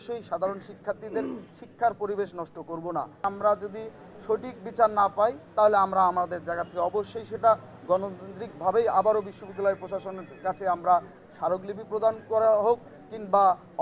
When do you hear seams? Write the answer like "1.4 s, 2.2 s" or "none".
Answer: 3.3 s